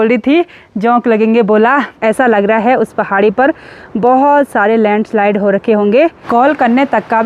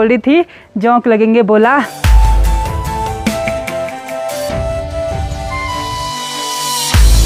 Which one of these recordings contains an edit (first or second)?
first